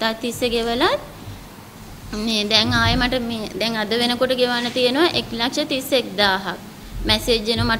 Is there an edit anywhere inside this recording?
no; 0 cuts

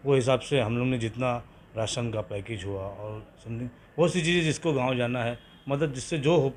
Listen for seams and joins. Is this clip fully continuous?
yes; 0 cuts

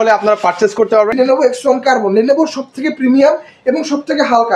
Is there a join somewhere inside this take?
yes; 1 cut; at 1.1 s

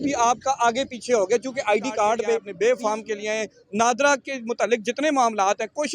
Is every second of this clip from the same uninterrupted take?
no; 1 cut; at 2.5 s

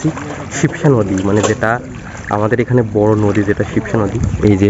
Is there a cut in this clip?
no; 0 cuts

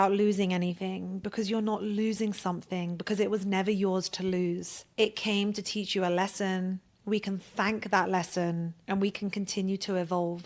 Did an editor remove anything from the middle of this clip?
yes; 2 cuts; at 4.8 s, 8.7 s

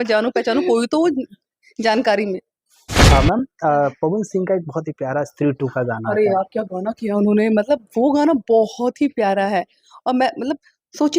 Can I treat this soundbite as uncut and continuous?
no; 1 cut; at 3.1 s

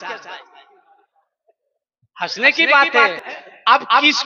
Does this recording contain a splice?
yes; 1 cut; at 3.3 s

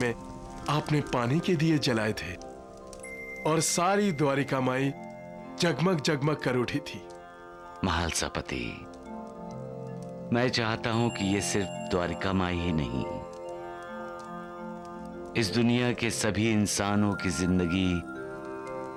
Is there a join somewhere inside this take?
no; 0 cuts

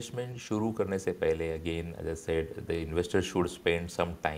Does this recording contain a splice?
no; 0 cuts

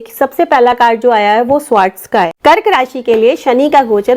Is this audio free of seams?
no; 1 cut; at 2.3 s

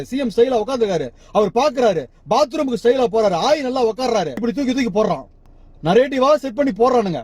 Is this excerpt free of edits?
yes; 0 cuts

